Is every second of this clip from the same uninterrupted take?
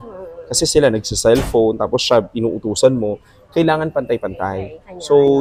yes; 0 cuts

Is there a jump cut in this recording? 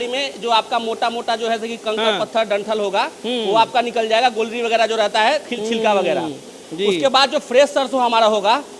no; 0 cuts

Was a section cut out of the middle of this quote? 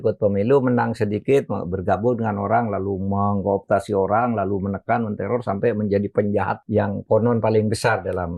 yes; 1 cut; at 6.6 s

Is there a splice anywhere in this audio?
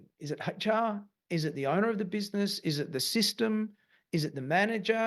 no; 0 cuts

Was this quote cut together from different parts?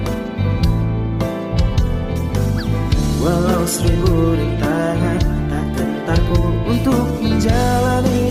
no; 0 cuts

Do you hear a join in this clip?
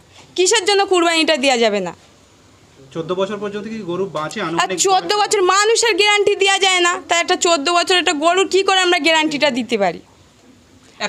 no; 0 cuts

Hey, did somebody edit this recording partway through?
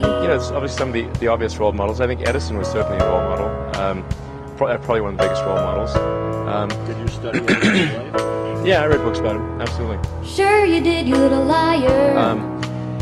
no; 0 cuts

